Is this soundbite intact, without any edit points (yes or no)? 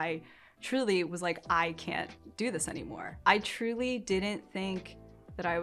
no